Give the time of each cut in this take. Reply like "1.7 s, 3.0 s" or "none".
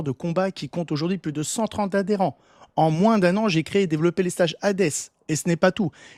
none